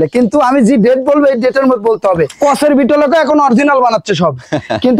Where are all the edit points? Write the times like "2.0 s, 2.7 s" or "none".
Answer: 2.3 s